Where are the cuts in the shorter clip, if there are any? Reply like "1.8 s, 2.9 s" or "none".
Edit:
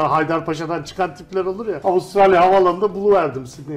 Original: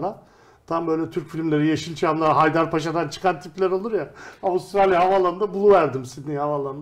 1.7 s